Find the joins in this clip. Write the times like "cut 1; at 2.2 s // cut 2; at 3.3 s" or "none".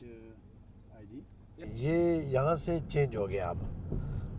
cut 1; at 1.6 s